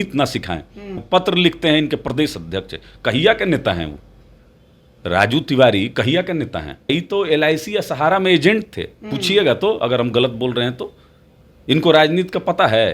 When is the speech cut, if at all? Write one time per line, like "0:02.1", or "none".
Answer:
0:01.0
0:06.9